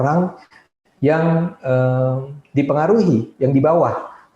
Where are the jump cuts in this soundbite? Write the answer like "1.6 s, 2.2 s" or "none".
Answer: none

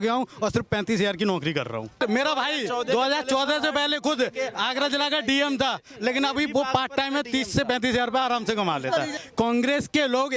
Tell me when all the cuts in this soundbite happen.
1.9 s, 9.2 s

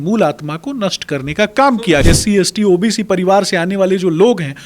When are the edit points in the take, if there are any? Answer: 2.0 s

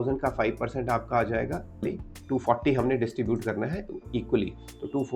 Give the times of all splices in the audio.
1.8 s

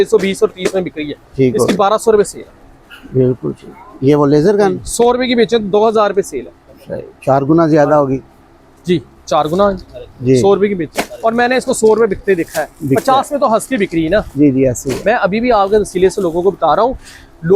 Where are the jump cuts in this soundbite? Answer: none

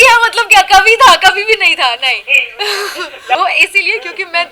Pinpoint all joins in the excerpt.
3.3 s

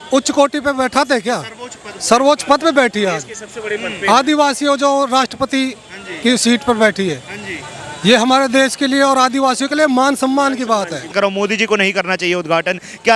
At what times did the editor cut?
11.0 s

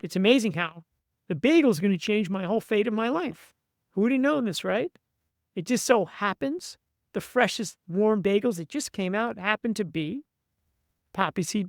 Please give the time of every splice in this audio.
none

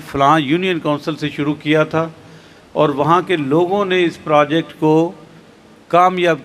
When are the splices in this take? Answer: none

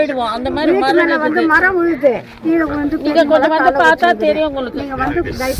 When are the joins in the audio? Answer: 2.4 s

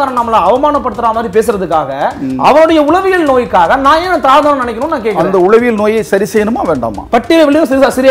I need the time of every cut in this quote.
none

